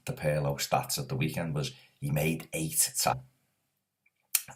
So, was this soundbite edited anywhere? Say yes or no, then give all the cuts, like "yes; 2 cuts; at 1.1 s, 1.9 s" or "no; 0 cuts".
no; 0 cuts